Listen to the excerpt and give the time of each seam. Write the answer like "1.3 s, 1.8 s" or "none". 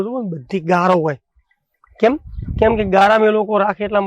none

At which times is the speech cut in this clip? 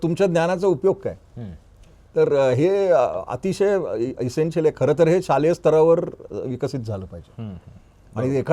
none

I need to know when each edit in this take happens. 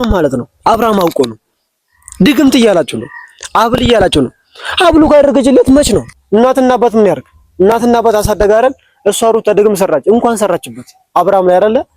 6.1 s

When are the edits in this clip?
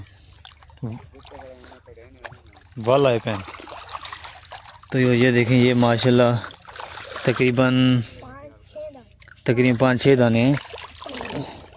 none

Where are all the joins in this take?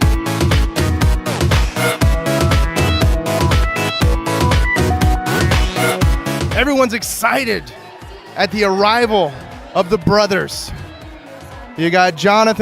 4.1 s

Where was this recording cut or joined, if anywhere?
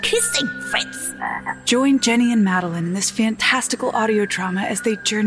1.6 s

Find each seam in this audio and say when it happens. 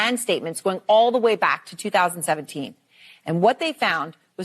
2.9 s

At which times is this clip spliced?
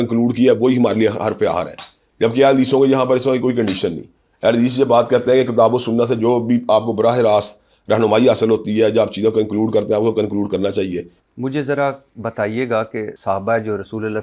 11.1 s, 13.1 s

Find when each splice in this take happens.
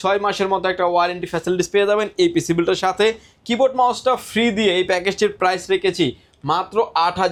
none

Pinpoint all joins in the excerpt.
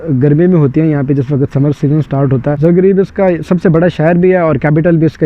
2.5 s

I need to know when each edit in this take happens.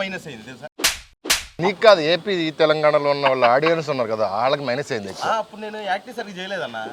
1.6 s

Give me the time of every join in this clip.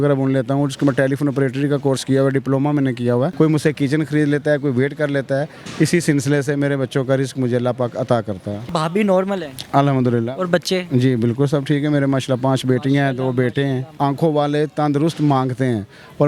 3.3 s, 8.7 s, 13.9 s

